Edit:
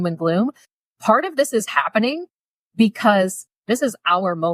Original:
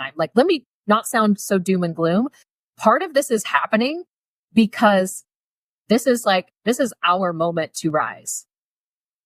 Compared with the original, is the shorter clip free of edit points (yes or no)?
no